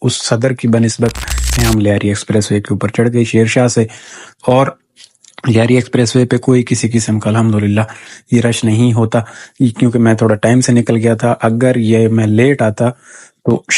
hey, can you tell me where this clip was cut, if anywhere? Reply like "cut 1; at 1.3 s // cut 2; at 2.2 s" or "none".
cut 1; at 1.6 s